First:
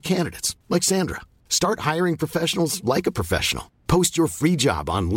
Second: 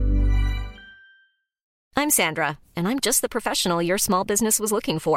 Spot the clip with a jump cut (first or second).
second